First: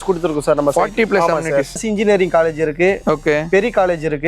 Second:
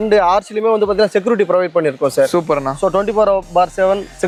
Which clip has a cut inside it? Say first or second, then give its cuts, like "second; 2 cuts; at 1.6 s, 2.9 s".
first; 1 cut; at 1.7 s